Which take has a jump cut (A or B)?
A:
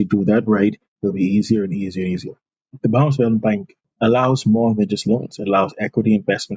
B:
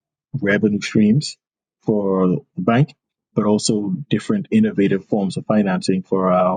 A